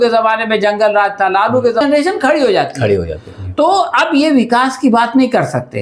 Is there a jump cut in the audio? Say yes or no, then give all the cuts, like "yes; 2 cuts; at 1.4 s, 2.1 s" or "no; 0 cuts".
yes; 1 cut; at 1.8 s